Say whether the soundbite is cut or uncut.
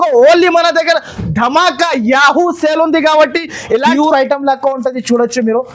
cut